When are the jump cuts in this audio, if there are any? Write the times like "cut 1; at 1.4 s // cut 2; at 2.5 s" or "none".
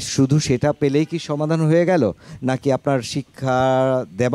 none